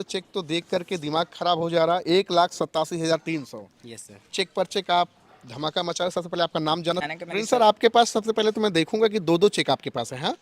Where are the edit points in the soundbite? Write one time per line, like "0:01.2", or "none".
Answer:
0:07.0